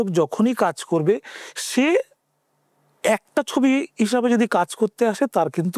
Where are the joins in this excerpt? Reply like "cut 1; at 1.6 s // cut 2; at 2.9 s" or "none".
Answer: none